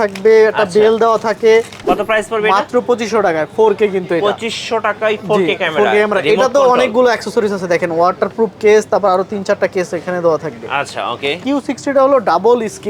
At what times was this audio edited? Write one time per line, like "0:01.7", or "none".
0:01.8
0:11.4